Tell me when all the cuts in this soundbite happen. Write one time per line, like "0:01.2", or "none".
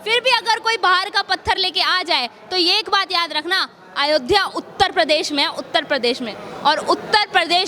none